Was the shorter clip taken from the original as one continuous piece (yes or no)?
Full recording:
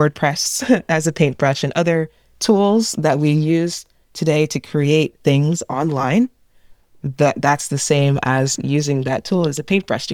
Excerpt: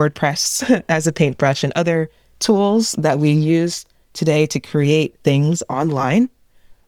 yes